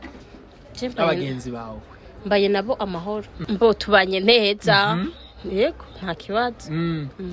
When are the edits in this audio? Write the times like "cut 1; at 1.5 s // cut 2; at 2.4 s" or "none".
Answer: cut 1; at 3.4 s